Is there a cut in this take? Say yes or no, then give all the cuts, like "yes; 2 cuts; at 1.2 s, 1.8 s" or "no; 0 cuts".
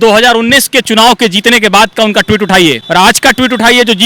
yes; 1 cut; at 2.8 s